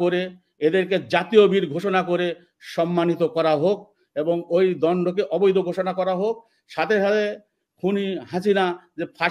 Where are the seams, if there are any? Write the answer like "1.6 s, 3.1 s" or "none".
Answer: none